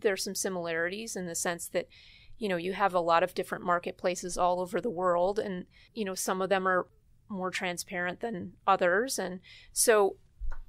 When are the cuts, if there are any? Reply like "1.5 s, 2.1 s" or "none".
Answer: 5.8 s, 6.9 s